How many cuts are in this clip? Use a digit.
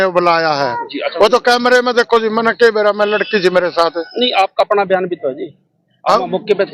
0